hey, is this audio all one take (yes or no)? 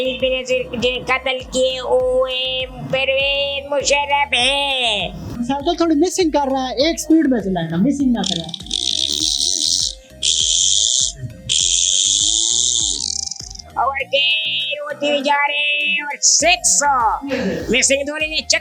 no